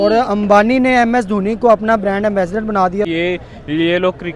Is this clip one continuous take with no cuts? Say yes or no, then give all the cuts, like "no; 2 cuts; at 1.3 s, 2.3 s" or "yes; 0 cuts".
no; 1 cut; at 3.1 s